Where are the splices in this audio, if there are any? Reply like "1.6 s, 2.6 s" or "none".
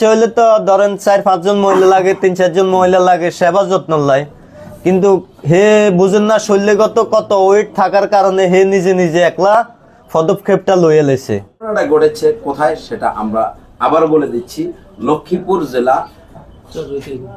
11.7 s